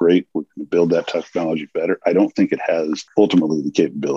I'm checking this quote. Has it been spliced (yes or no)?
yes